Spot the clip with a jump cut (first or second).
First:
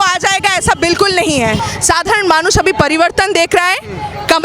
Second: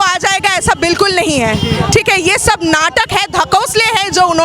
first